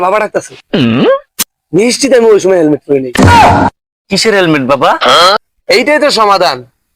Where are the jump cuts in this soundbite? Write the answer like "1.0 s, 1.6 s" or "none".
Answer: 5.4 s

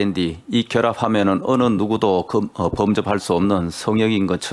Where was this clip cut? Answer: none

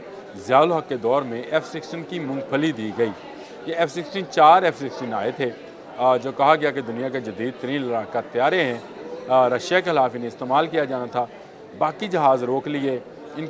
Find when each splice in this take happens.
none

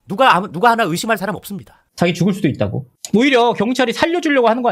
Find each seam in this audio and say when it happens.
1.8 s

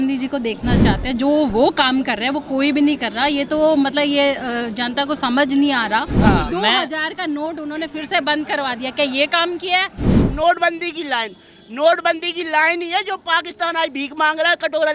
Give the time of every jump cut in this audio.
6.1 s, 10.2 s

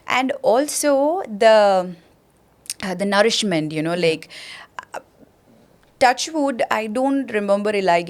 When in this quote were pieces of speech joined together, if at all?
none

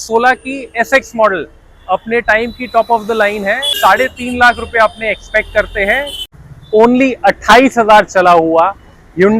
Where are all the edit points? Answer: 3.7 s, 6.2 s

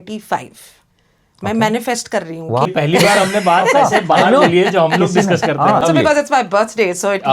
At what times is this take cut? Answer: 2.7 s, 5.8 s

